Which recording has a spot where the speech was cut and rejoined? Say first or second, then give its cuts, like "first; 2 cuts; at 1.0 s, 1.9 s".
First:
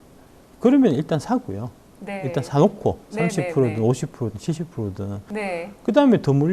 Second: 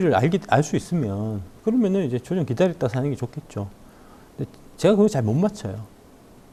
first; 1 cut; at 5.2 s